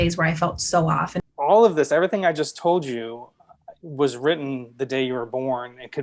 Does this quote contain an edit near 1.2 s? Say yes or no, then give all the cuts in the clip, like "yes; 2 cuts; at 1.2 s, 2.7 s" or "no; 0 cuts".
yes; 1 cut; at 1.2 s